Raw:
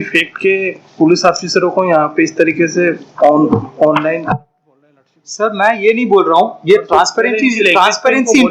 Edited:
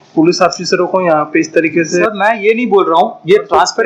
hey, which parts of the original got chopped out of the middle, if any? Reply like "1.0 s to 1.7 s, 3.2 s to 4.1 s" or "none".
2.9 s to 5.4 s